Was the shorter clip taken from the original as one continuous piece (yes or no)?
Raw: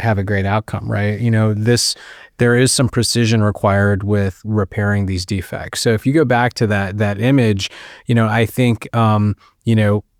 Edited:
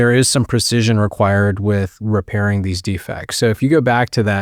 yes